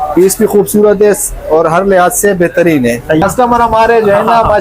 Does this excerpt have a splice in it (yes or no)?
yes